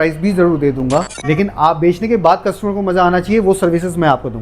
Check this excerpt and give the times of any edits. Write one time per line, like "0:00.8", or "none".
0:01.1